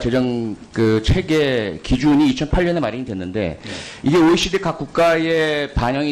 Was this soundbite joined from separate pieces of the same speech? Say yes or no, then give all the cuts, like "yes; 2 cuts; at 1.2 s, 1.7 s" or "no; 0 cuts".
no; 0 cuts